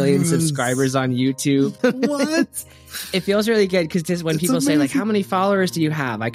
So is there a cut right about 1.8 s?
yes; 1 cut; at 1.8 s

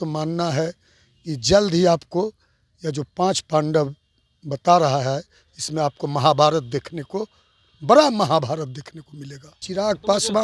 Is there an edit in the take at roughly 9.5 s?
yes; 1 cut; at 9.5 s

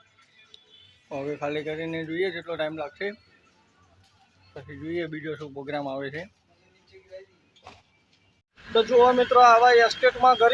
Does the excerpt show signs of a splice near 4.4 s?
no; 1 cut; at 8.5 s

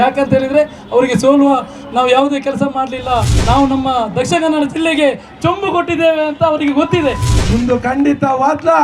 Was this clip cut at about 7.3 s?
yes; 1 cut; at 7.3 s

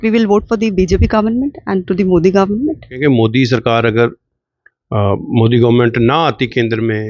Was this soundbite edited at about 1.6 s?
no; 1 cut; at 2.9 s

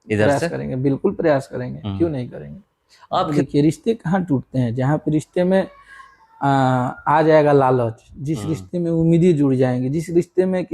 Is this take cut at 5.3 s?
no; 1 cut; at 3.3 s

